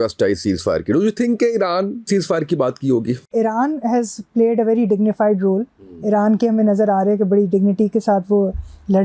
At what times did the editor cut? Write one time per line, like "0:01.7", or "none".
0:02.1
0:03.3